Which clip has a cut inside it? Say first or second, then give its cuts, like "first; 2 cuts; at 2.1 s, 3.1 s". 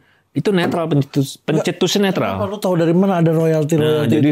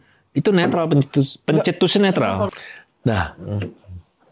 second; 1 cut; at 2.5 s